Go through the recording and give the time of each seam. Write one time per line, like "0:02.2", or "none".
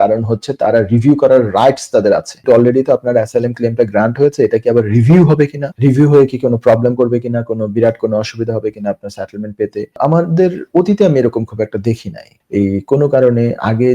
0:02.3
0:05.6
0:10.0
0:12.3

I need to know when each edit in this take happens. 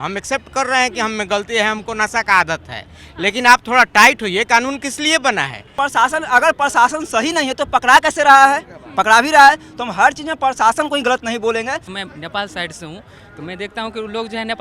0:05.6
0:11.9

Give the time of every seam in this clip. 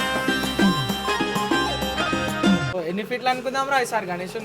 0:02.7

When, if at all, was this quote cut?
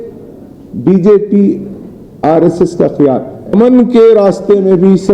0:03.5

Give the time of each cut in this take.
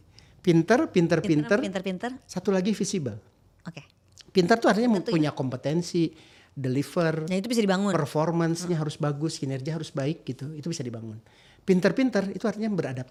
none

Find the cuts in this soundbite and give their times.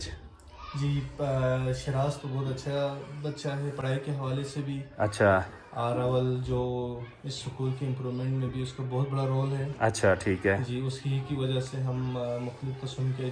none

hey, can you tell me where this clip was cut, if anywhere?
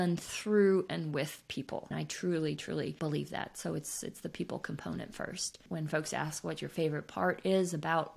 none

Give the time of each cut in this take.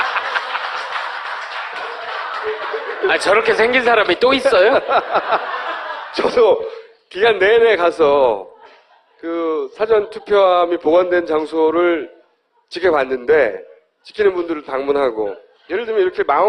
0:04.3

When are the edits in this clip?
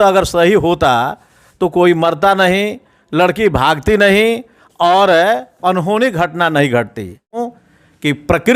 0:07.4

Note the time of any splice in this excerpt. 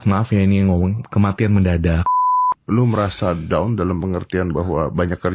0:02.3

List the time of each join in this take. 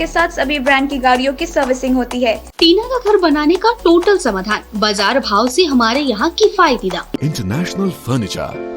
0:02.5
0:07.2

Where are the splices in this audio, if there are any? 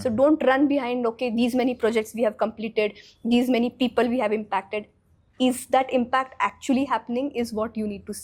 none

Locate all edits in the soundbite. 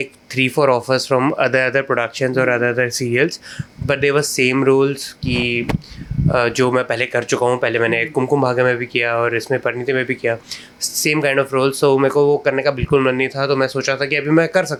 none

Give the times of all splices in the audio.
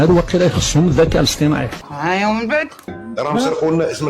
0:01.8
0:03.0

